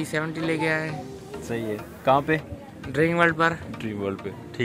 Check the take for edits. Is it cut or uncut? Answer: uncut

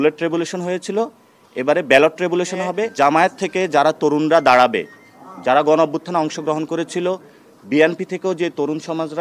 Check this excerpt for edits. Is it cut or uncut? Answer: cut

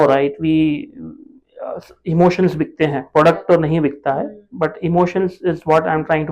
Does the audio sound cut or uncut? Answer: uncut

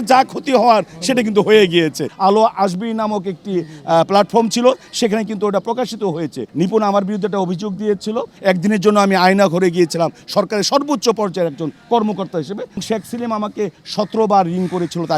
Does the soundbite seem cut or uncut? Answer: cut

